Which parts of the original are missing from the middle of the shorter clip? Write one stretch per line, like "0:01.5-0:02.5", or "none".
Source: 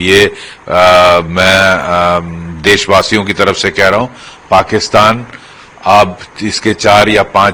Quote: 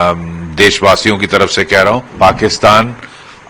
0:04.1-0:04.4